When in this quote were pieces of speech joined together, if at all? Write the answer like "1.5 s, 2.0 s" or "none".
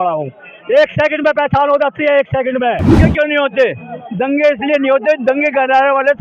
3.0 s

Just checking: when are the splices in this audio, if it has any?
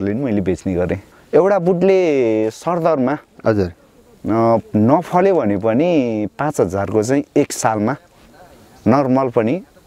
1.1 s

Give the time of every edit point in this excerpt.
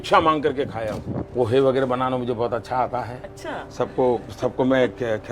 1.3 s

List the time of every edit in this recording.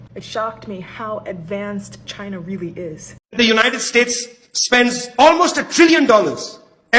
3.1 s

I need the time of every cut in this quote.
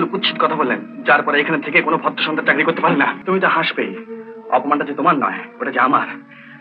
3.2 s

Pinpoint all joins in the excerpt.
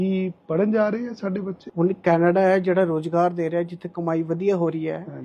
1.6 s

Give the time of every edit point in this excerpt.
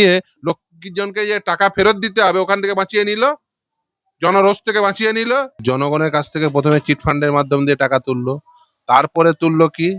5.6 s

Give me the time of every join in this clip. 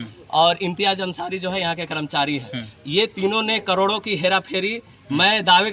none

